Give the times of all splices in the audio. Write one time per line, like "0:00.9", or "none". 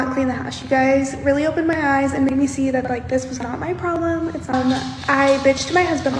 0:04.5